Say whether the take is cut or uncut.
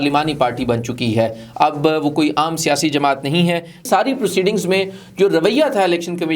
cut